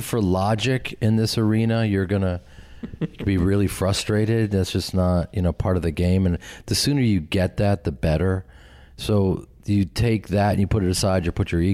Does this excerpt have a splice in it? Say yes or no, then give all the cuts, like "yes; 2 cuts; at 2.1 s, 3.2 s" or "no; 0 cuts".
no; 0 cuts